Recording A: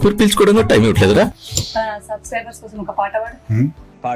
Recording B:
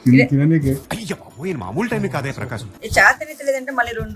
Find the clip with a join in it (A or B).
A